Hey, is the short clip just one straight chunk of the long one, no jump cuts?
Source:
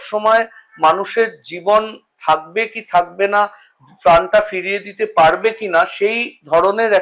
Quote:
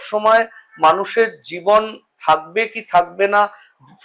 yes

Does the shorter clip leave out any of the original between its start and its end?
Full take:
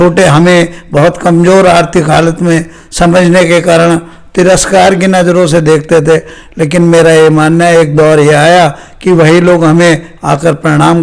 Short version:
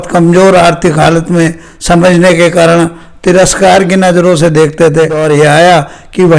yes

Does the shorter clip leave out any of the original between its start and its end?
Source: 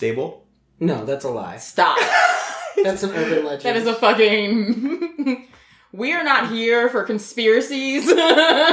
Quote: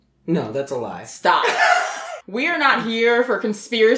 yes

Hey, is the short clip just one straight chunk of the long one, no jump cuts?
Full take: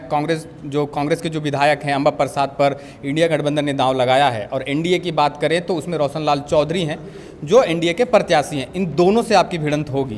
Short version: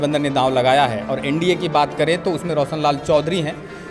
yes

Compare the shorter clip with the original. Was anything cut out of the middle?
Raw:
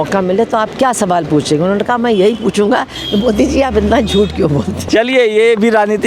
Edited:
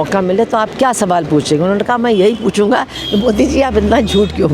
no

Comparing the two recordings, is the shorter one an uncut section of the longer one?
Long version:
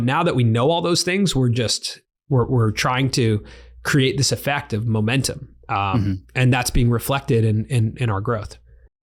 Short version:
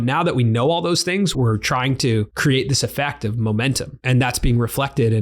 no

